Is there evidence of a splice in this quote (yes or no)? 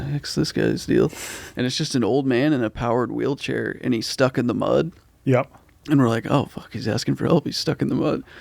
no